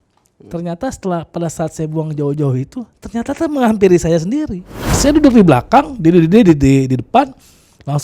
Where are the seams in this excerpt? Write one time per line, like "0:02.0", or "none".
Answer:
0:05.0